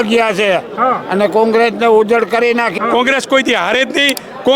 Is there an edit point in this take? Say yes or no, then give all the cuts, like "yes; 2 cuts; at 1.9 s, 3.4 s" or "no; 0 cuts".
yes; 1 cut; at 2.7 s